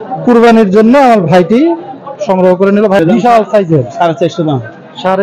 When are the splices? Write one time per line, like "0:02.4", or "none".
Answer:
0:03.0